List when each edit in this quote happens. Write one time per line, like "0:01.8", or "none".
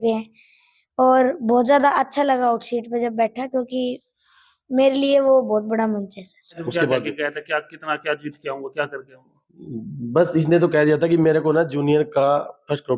0:06.6